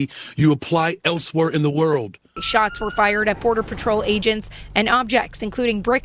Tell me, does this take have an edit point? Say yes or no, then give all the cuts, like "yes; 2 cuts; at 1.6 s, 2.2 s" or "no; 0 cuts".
yes; 1 cut; at 2.4 s